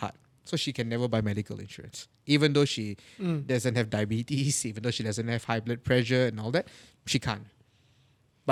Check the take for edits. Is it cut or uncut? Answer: uncut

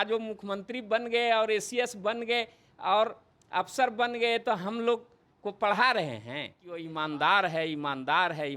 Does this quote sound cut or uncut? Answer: cut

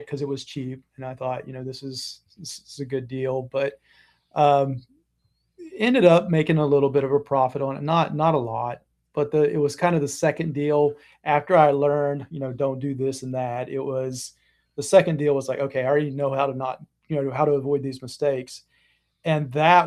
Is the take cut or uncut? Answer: uncut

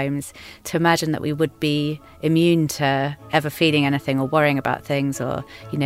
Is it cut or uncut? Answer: uncut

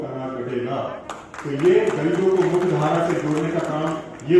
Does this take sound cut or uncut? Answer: uncut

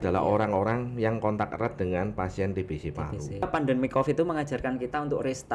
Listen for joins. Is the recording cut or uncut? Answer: cut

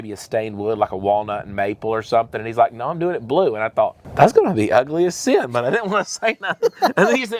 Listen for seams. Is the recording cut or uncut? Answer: uncut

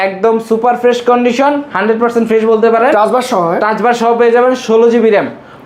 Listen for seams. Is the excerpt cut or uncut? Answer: uncut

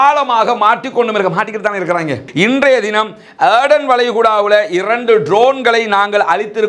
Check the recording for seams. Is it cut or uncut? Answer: cut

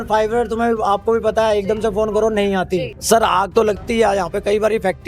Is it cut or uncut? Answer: cut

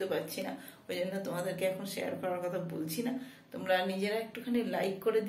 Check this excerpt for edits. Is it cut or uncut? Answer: uncut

